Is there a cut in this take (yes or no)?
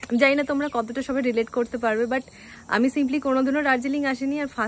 no